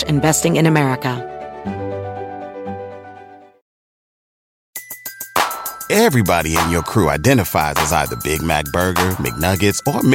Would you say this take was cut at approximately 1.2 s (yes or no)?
yes